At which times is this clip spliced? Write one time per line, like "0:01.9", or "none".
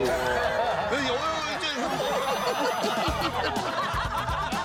none